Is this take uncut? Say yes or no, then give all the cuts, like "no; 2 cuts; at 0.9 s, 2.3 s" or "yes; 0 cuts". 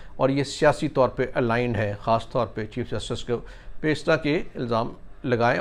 yes; 0 cuts